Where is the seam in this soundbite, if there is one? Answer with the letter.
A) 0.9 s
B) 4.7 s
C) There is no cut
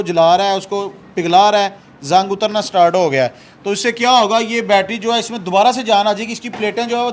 C